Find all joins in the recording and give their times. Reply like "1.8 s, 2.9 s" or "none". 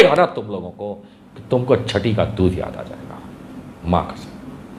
none